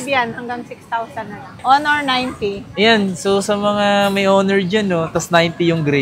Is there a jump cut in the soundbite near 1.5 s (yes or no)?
yes